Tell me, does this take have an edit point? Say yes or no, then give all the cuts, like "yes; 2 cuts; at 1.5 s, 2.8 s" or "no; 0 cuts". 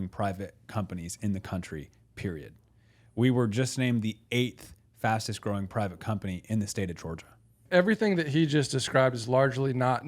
yes; 1 cut; at 7.6 s